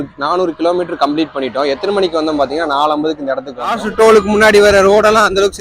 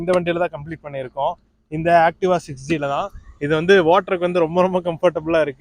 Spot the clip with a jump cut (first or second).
first